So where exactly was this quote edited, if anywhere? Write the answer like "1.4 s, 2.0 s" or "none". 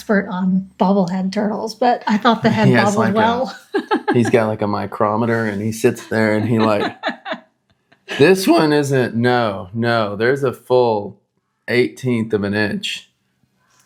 none